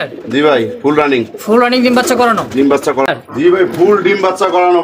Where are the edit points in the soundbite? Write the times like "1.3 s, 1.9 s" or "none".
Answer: 3.1 s